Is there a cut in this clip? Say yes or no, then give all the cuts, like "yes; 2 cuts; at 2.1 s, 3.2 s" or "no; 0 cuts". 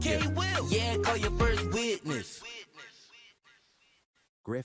no; 0 cuts